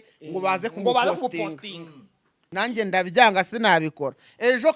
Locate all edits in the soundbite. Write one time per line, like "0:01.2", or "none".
0:02.4